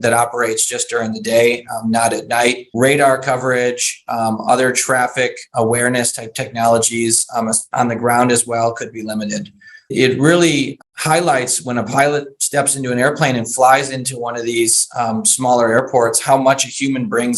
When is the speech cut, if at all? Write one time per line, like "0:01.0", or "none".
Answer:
0:02.7
0:09.9
0:10.7